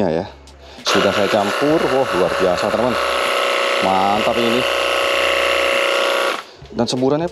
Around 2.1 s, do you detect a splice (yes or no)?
no